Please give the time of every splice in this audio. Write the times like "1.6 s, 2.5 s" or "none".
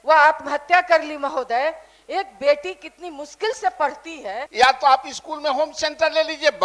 4.4 s